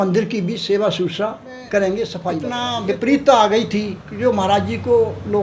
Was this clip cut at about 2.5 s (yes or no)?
yes